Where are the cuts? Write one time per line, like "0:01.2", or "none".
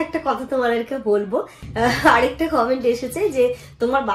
0:01.6